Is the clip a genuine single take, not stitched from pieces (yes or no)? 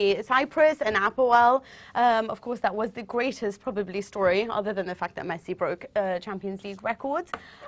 no